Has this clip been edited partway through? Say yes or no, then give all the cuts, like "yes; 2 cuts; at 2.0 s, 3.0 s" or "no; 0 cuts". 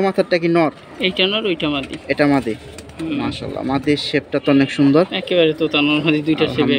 no; 0 cuts